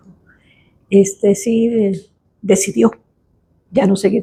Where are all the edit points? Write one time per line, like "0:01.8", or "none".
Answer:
none